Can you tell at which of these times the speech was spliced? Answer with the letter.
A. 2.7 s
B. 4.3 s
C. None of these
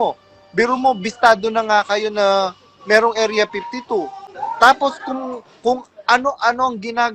B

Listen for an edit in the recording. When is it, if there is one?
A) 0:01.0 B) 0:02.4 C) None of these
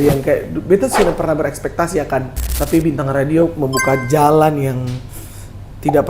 B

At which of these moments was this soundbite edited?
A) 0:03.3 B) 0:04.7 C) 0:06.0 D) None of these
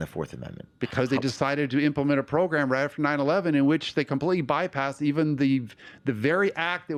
D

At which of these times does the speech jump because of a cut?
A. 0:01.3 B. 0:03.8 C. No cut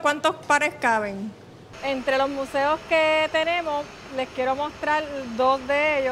A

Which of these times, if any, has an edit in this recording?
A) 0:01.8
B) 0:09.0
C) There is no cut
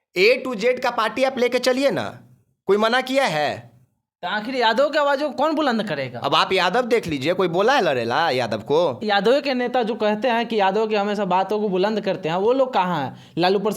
B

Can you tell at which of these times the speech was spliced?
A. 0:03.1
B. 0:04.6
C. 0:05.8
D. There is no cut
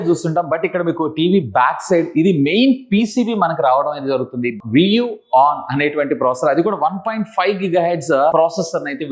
B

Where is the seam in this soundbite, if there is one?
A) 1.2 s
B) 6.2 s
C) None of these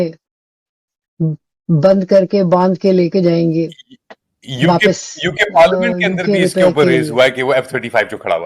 C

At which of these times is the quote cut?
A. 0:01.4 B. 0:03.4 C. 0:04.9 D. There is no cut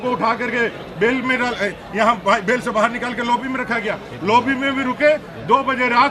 D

